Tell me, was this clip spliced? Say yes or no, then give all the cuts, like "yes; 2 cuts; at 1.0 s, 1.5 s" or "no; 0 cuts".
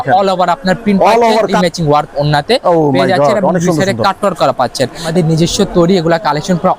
yes; 2 cuts; at 1.5 s, 5.1 s